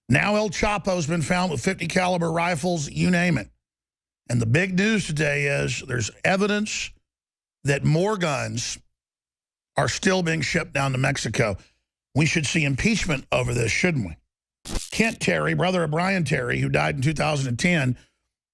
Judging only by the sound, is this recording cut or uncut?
uncut